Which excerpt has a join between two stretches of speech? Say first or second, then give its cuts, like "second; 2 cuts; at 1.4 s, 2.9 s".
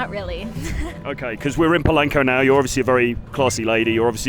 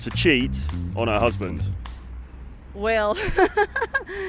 first; 1 cut; at 1.0 s